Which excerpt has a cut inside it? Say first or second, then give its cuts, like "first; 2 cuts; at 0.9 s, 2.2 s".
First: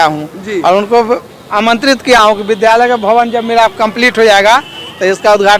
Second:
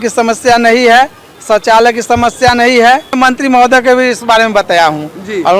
second; 1 cut; at 3.1 s